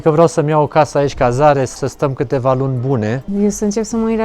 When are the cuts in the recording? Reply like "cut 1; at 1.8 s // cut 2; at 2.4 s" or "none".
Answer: cut 1; at 1.8 s // cut 2; at 3.2 s